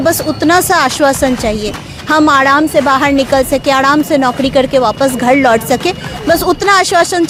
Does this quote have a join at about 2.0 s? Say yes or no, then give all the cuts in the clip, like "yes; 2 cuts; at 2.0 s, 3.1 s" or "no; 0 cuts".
no; 0 cuts